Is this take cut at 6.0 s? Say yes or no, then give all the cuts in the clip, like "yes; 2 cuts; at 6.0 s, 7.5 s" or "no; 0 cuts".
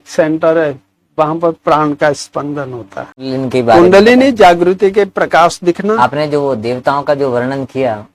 yes; 2 cuts; at 3.3 s, 6.0 s